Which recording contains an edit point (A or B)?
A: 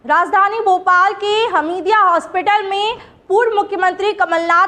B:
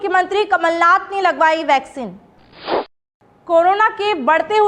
B